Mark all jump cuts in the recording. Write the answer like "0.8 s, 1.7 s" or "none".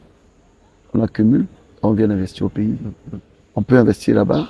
none